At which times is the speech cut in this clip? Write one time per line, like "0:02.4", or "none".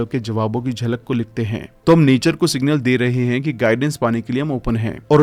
none

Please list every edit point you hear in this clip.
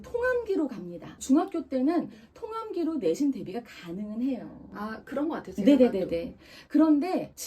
none

